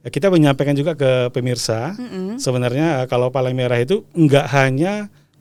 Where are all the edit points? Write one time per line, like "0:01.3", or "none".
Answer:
none